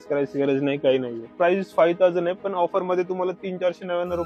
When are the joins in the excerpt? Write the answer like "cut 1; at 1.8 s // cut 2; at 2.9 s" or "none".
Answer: cut 1; at 1.3 s

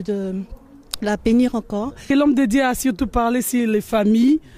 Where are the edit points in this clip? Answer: cut 1; at 2.1 s

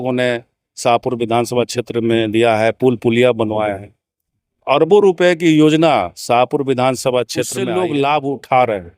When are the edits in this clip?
cut 1; at 7.6 s

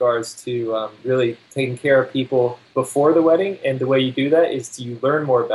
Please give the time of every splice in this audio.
cut 1; at 1.4 s // cut 2; at 2.6 s

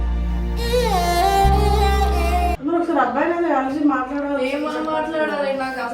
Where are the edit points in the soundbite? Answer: cut 1; at 2.6 s

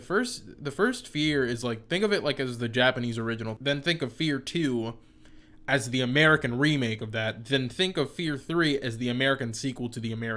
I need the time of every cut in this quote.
cut 1; at 3.6 s

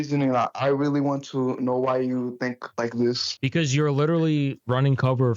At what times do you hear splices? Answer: none

